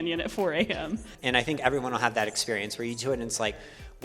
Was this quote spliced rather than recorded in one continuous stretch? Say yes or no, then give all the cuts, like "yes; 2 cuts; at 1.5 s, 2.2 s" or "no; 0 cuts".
yes; 1 cut; at 1.1 s